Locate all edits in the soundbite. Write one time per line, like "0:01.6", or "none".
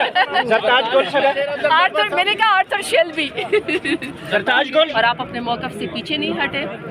0:04.9